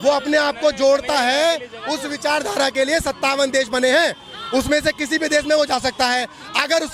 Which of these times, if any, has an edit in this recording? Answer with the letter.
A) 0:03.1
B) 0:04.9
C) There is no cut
C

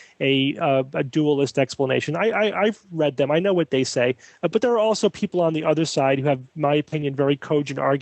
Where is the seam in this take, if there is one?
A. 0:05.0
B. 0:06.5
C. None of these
B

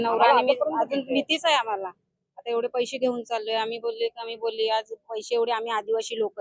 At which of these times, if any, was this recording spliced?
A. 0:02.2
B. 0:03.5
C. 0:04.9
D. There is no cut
D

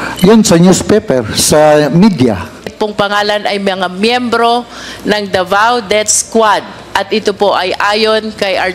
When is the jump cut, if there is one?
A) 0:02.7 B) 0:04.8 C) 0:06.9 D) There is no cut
A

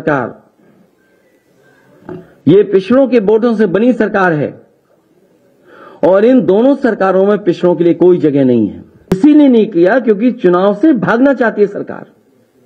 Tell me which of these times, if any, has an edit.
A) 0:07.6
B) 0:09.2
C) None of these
B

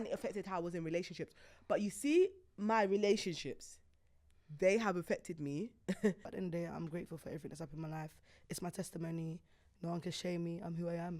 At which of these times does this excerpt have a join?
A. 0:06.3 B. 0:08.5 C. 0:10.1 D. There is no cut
A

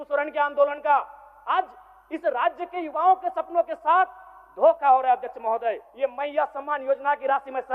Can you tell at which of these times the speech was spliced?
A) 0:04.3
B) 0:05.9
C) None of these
B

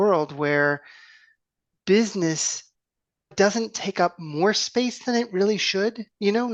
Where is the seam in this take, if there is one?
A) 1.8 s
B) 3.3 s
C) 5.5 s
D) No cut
B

